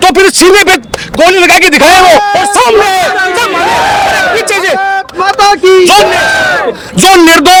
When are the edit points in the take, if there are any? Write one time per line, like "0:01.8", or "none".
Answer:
none